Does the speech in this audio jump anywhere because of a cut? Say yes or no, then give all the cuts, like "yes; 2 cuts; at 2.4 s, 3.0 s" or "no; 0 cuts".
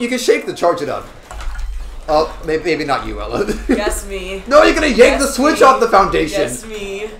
no; 0 cuts